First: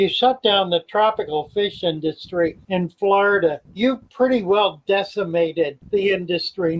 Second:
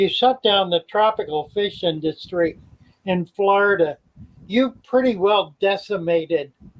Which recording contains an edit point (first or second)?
first